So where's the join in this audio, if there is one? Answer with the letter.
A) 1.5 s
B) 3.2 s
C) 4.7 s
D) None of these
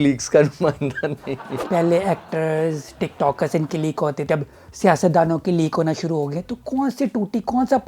A